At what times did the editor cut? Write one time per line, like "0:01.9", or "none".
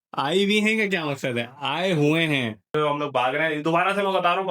0:02.7